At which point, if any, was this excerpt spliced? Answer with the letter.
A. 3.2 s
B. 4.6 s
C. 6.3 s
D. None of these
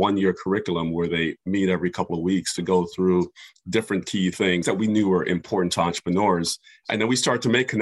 B